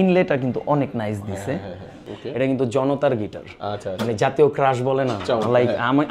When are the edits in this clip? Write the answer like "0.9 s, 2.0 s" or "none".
2.1 s